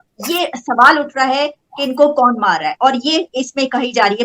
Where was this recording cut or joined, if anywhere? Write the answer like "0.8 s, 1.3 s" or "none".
none